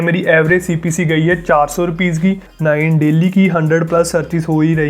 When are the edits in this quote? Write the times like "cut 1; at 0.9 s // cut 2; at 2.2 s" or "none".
cut 1; at 2.5 s